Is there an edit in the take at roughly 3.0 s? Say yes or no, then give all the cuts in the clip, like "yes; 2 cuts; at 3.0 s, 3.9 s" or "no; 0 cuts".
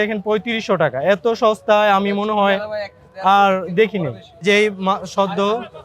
no; 1 cut; at 4.3 s